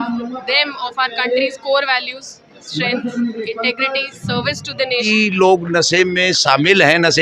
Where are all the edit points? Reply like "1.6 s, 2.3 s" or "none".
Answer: 5.1 s